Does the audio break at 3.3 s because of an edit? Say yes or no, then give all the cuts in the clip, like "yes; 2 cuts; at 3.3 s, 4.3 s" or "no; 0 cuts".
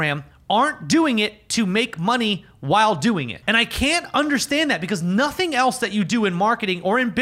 yes; 1 cut; at 3.3 s